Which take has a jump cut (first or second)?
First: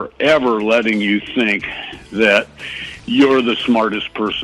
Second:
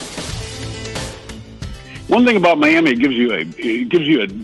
second